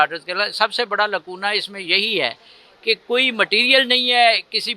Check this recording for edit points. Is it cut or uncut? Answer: uncut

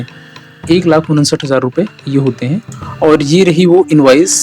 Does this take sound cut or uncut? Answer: cut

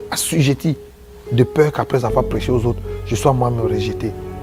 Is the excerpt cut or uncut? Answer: uncut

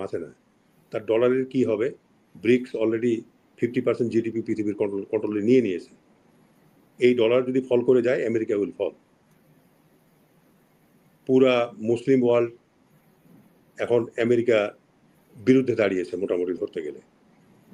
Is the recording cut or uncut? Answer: uncut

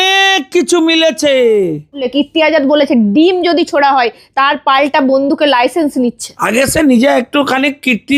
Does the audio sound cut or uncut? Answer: cut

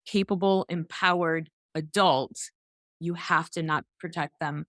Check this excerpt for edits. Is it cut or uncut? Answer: uncut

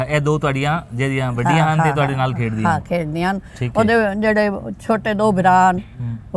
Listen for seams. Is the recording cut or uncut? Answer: uncut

